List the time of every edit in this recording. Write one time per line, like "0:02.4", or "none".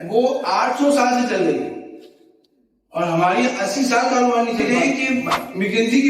0:04.6